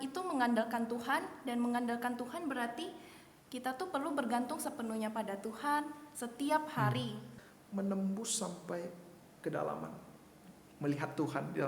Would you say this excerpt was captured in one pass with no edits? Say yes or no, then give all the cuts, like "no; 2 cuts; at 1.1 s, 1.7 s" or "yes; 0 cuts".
no; 1 cut; at 7.3 s